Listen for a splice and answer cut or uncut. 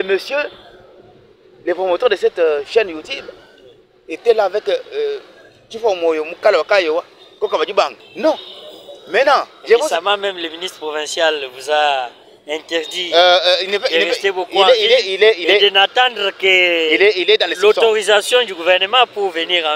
cut